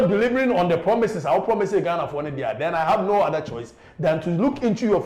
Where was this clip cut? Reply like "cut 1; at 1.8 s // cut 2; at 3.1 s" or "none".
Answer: none